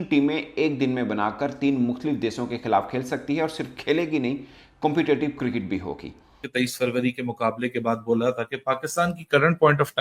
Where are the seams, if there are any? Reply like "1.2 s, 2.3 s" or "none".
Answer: 6.5 s